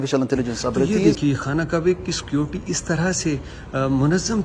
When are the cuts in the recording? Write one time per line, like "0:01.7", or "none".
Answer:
0:00.9